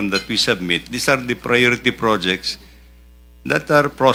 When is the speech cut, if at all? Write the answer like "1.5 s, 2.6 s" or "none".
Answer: none